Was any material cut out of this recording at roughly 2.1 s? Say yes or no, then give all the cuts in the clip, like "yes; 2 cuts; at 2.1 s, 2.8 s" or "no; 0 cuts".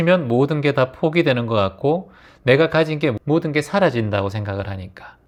no; 0 cuts